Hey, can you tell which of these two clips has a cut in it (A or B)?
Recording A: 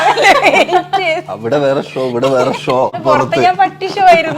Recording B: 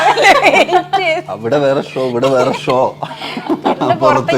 A